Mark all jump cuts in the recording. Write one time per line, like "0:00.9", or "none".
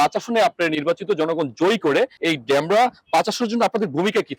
0:02.2